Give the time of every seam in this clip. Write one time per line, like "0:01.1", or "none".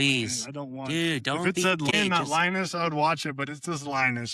0:01.9